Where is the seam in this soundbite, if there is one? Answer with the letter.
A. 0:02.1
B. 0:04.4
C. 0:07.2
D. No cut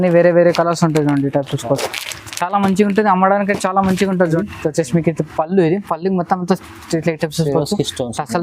B